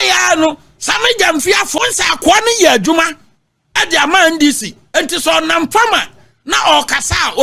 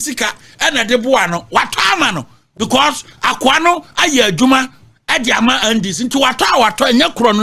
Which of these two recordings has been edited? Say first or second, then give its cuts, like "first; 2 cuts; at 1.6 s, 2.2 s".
first; 1 cut; at 1.8 s